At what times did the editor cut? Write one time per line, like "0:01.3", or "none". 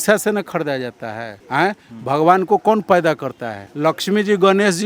none